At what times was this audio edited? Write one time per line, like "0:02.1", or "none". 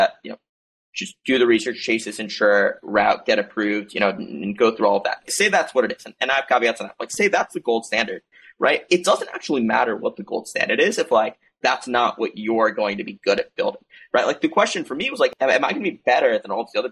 0:05.3
0:15.3